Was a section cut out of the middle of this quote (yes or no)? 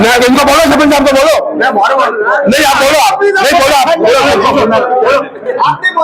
no